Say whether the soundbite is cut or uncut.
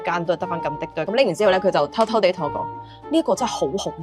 cut